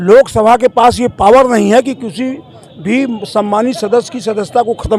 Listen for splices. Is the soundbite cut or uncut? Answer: uncut